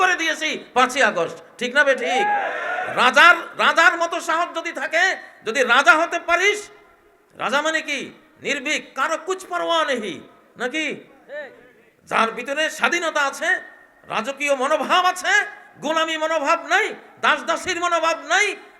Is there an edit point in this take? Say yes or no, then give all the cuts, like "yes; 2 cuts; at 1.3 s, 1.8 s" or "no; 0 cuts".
no; 0 cuts